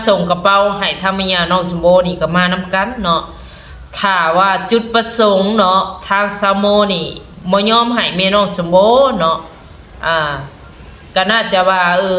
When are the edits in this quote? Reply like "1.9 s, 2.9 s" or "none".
none